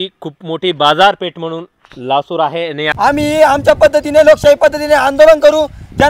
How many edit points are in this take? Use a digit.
1